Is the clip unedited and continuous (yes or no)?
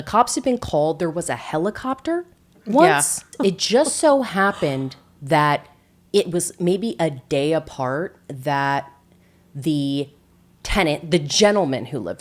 no